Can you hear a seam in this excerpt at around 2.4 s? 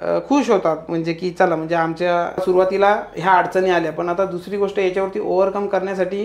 yes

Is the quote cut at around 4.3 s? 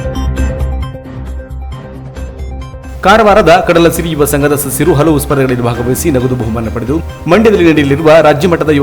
no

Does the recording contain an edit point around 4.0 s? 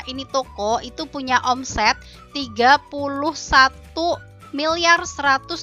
no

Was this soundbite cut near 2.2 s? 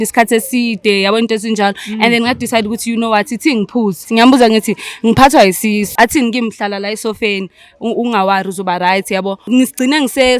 no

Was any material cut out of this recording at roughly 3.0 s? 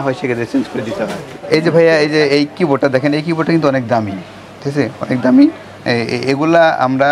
no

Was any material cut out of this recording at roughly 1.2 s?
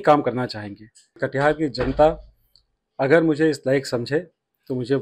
yes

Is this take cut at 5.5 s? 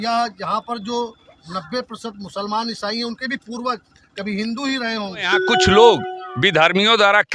yes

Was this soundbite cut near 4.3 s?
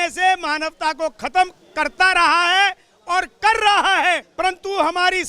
yes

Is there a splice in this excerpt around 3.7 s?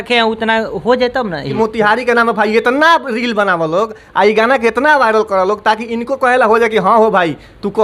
no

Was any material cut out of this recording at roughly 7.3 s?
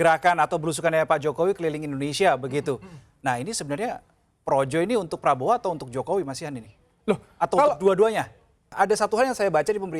no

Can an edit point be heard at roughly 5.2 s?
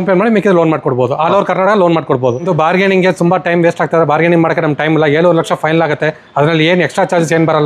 no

